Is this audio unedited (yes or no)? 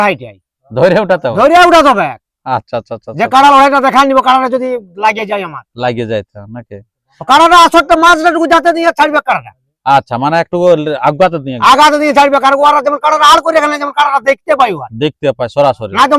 yes